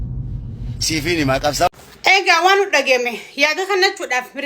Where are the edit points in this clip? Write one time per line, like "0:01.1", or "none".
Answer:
0:01.7